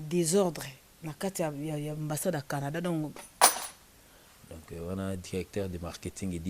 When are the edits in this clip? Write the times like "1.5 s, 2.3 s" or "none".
3.2 s